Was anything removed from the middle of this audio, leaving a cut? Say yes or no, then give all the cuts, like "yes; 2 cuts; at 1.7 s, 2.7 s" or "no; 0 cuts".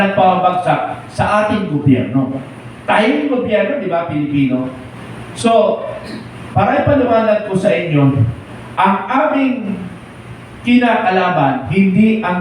no; 0 cuts